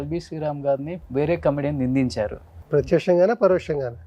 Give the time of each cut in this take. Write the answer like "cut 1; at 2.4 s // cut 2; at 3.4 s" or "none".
cut 1; at 0.9 s // cut 2; at 2.6 s